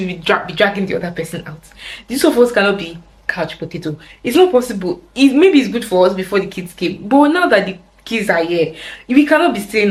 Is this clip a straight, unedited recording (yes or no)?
yes